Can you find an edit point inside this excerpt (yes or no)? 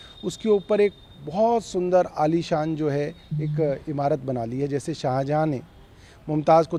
no